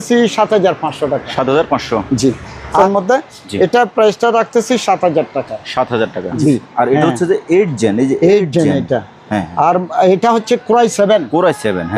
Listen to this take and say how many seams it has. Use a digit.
2